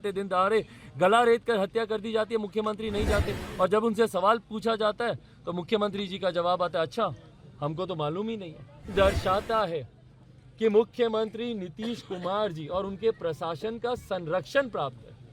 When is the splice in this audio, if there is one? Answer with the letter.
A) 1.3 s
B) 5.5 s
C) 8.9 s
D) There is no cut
C